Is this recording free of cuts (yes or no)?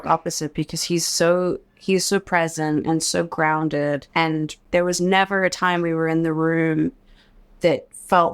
no